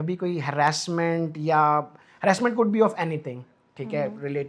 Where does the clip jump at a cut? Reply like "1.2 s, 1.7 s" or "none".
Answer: none